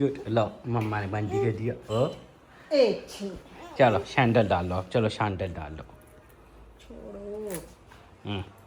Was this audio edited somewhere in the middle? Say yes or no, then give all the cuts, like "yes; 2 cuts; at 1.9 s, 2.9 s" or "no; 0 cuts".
no; 0 cuts